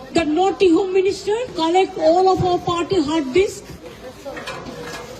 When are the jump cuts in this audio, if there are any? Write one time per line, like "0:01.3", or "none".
0:01.5